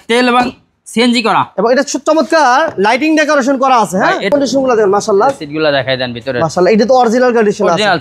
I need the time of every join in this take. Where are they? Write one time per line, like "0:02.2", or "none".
0:04.3